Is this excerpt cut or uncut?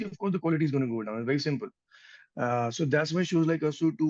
uncut